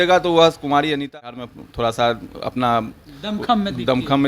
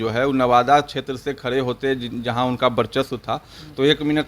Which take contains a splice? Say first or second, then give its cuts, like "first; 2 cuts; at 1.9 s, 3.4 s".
first; 1 cut; at 1.1 s